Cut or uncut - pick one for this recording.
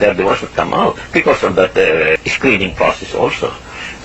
cut